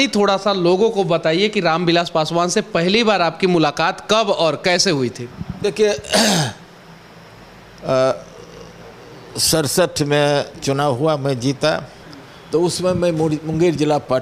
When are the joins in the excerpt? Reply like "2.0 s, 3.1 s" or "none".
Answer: none

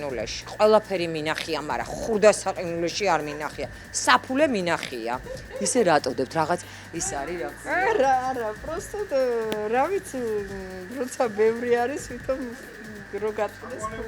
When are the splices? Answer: none

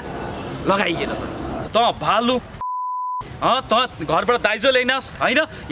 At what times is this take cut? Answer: 1.6 s

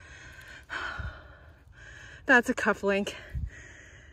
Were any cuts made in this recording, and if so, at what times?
none

